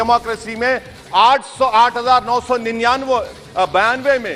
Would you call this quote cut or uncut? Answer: uncut